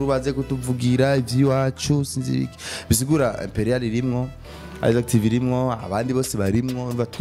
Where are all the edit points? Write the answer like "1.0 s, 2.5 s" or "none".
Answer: none

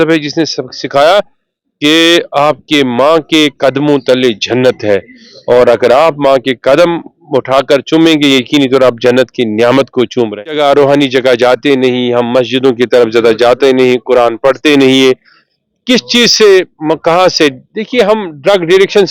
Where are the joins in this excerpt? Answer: 10.4 s

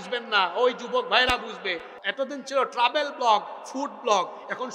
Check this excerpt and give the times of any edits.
2.0 s

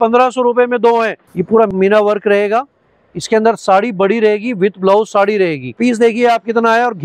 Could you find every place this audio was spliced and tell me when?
1.2 s, 5.7 s

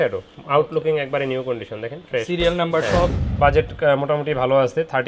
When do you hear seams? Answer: 3.1 s

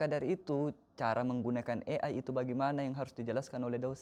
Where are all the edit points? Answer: none

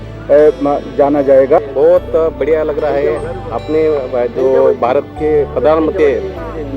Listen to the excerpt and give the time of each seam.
1.7 s

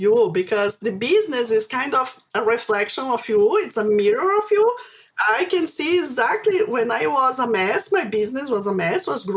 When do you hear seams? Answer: 5.1 s

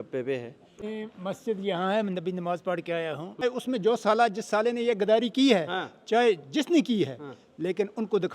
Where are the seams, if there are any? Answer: 0.8 s, 3.4 s

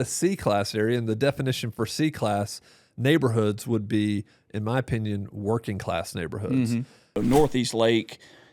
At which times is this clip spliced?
7.2 s

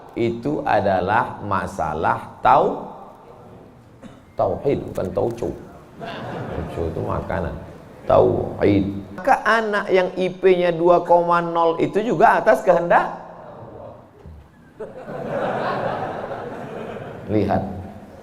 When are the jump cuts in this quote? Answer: 9.2 s

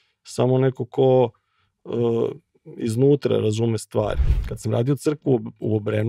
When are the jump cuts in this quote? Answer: 4.2 s

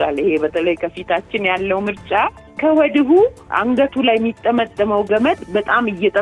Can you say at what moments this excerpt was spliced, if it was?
none

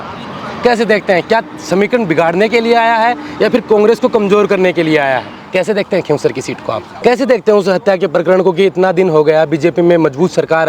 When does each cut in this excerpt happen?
5.4 s, 6.9 s

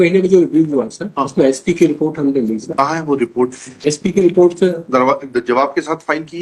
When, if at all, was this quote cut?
none

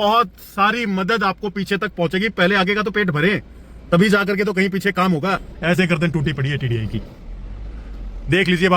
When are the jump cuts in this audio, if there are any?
5.5 s

